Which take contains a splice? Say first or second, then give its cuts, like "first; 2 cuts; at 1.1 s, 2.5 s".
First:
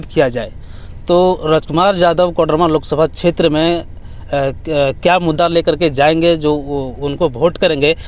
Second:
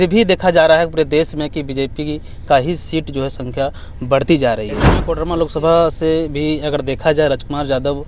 second; 1 cut; at 5.1 s